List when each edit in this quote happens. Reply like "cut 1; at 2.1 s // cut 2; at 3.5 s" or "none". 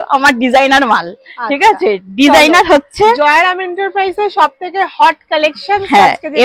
none